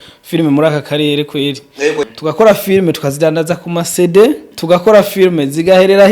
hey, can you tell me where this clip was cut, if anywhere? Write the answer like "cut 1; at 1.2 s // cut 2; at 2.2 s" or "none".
cut 1; at 2.1 s // cut 2; at 4.5 s